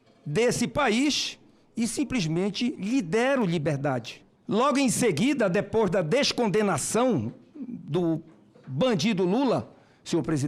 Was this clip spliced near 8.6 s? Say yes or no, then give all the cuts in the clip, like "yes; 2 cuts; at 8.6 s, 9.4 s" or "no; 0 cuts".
no; 1 cut; at 4.2 s